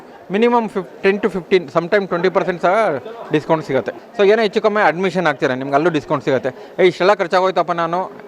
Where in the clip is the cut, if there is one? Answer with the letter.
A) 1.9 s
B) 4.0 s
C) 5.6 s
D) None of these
B